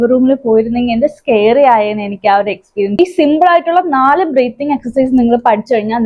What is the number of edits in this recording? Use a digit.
1